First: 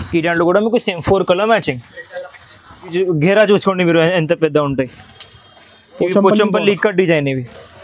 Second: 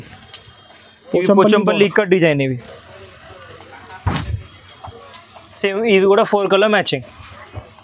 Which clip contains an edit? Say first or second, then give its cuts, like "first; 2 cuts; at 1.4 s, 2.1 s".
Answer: first; 1 cut; at 2.9 s